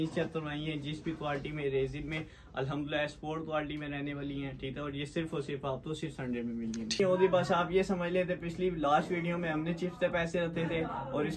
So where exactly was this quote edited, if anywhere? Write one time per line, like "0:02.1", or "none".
0:07.0